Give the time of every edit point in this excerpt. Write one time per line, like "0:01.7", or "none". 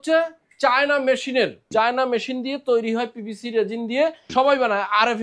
0:01.6
0:04.2